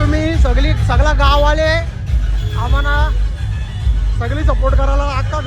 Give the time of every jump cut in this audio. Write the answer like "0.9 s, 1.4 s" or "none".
none